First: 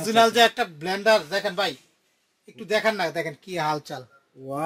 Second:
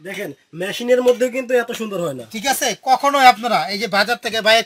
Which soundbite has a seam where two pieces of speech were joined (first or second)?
first